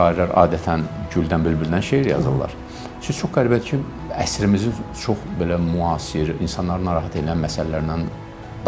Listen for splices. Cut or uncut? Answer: cut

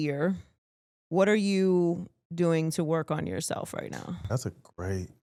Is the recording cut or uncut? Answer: uncut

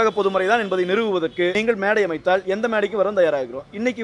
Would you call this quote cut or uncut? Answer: cut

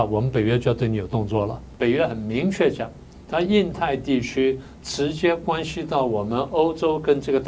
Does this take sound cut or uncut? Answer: cut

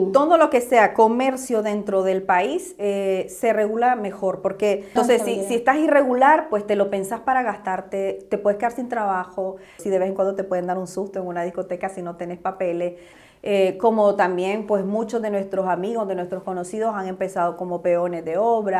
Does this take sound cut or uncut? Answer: cut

